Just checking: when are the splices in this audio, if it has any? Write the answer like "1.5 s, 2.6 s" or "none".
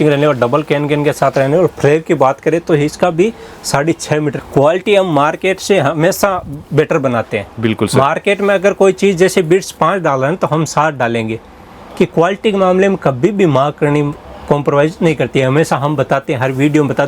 4.4 s